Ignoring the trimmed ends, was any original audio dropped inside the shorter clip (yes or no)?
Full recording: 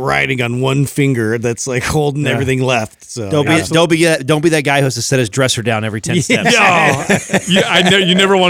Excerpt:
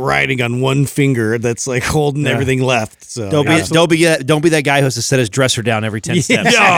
no